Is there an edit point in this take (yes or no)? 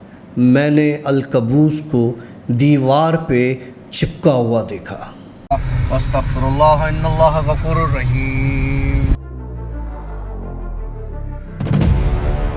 yes